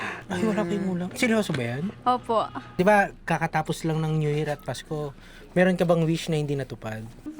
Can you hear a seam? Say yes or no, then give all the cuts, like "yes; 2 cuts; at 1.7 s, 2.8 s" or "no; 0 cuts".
yes; 1 cut; at 2.7 s